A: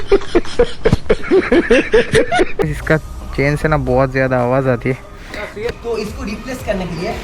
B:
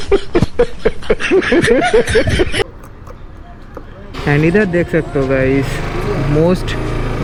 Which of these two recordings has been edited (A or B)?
A